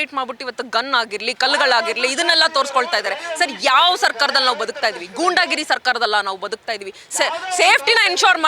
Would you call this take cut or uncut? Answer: uncut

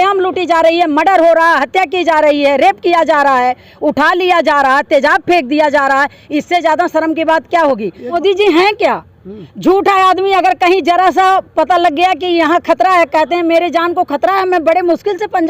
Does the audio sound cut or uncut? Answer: cut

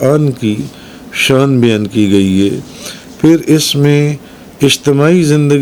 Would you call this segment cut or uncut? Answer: uncut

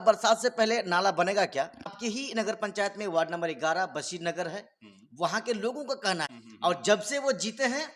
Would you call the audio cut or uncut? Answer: cut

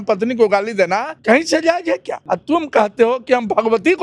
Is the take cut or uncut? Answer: cut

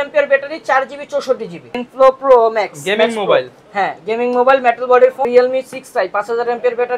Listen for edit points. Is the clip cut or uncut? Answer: cut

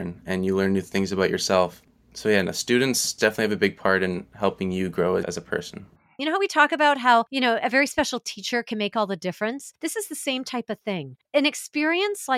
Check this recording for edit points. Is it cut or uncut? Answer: cut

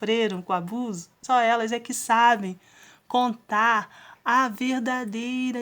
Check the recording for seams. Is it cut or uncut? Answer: cut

